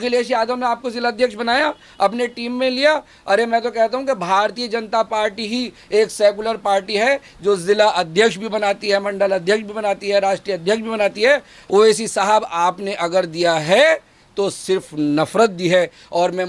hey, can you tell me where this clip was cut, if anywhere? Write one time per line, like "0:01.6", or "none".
0:11.5